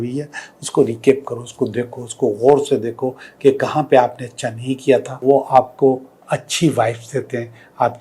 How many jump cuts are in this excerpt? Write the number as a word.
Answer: one